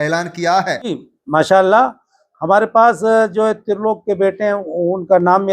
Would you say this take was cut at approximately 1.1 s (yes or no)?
yes